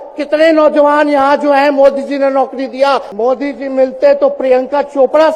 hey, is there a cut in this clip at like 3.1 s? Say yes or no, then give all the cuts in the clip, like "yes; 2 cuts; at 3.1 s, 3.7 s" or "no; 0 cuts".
yes; 1 cut; at 3.1 s